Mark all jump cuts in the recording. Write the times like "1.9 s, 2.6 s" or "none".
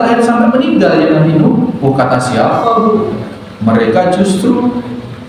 1.8 s